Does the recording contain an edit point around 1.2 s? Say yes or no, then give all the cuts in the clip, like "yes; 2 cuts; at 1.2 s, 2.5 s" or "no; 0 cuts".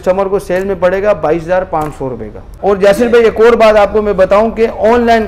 no; 1 cut; at 2.5 s